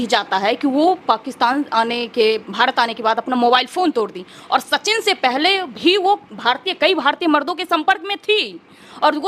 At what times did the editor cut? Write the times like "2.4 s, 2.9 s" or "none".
none